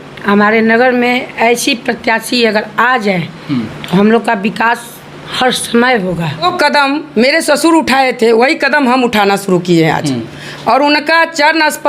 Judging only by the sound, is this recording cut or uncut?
cut